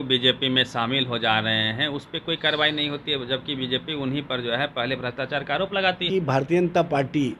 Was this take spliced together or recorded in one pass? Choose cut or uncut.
cut